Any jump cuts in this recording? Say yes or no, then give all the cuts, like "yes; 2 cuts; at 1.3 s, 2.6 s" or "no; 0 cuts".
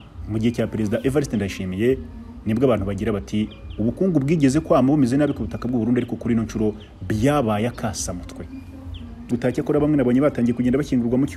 yes; 1 cut; at 9.3 s